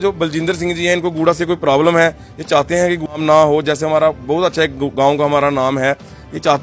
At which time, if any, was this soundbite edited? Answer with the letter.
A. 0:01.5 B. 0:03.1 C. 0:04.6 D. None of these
B